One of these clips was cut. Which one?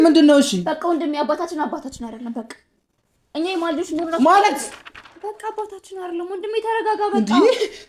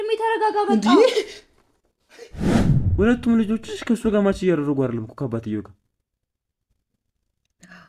second; 1 cut; at 2.5 s

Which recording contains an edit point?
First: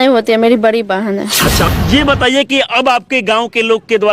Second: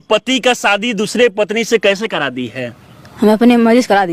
first; 1 cut; at 1.7 s

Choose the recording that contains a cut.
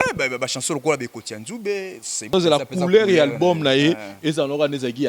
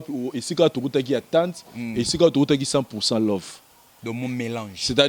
first; 1 cut; at 2.3 s

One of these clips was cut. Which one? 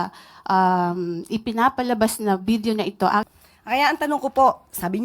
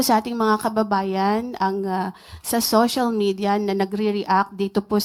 first; 1 cut; at 3.3 s

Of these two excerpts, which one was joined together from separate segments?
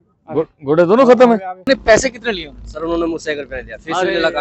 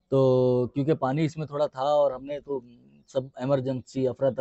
first; 1 cut; at 1.6 s

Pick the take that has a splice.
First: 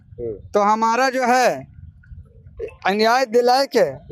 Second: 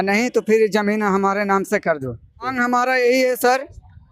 second; 1 cut; at 2.5 s

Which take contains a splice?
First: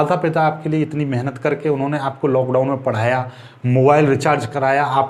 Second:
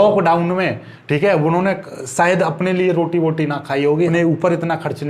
second; 1 cut; at 4.1 s

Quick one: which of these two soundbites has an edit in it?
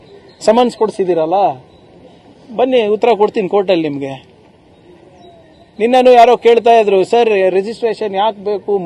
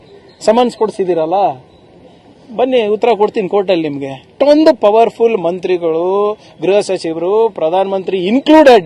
second; 1 cut; at 4.2 s

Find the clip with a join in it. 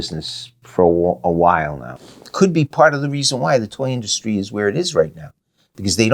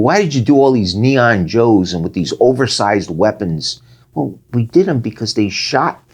first; 1 cut; at 2.0 s

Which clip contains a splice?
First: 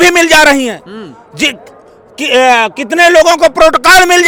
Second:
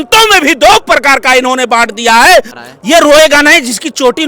second; 1 cut; at 2.6 s

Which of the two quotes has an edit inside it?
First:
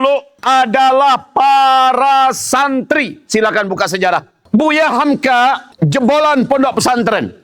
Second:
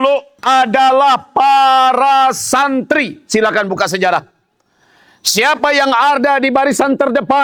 first; 1 cut; at 4.4 s

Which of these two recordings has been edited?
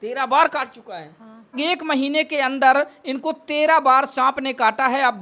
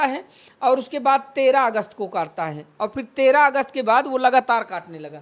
first; 1 cut; at 1.6 s

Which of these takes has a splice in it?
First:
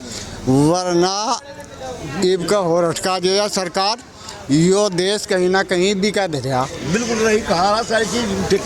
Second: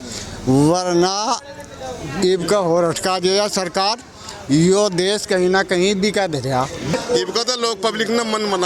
second; 1 cut; at 6.9 s

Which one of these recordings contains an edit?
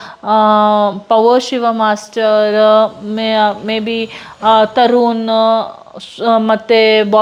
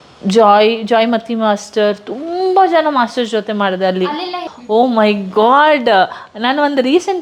second; 1 cut; at 4.0 s

